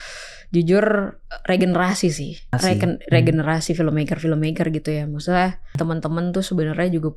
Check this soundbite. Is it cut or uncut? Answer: cut